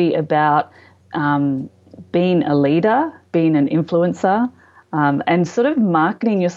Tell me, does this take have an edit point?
no; 0 cuts

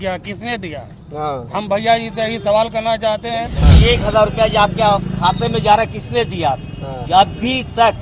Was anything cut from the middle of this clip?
yes; 1 cut; at 3.6 s

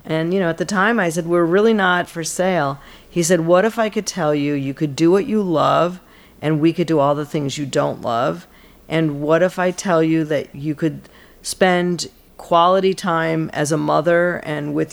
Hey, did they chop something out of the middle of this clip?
yes; 1 cut; at 2.1 s

